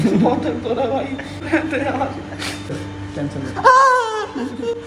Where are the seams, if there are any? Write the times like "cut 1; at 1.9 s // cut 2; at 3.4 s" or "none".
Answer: cut 1; at 1.4 s // cut 2; at 2.7 s